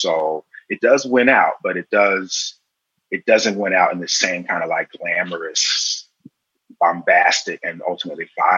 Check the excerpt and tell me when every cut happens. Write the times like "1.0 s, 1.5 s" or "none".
none